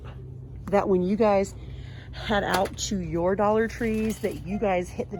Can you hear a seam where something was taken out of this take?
no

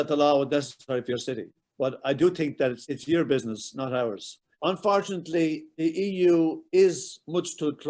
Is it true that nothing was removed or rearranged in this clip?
no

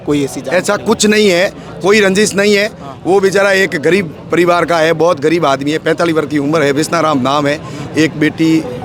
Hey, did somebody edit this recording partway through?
no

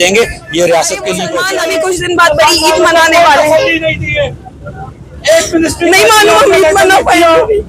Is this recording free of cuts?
no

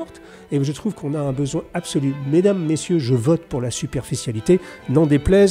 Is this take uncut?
yes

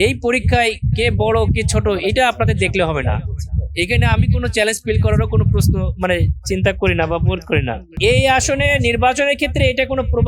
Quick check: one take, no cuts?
no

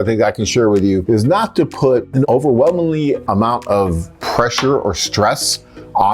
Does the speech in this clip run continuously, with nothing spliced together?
no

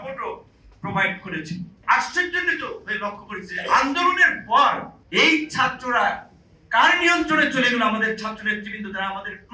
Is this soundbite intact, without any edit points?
no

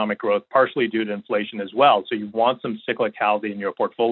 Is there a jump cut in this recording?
no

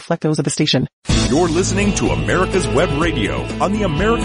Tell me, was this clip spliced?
yes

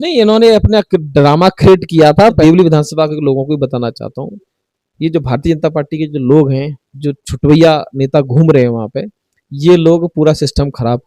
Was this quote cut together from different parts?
yes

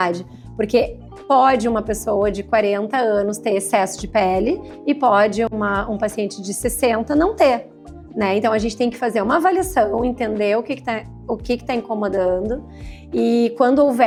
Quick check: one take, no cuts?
yes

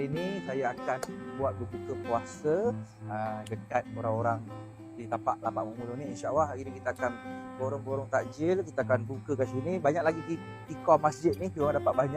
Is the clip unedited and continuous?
yes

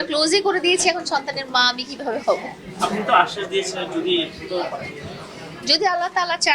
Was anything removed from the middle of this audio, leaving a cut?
no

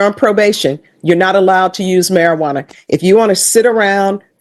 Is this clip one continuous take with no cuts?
yes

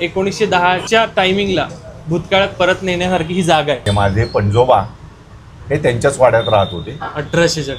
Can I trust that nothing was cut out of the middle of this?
no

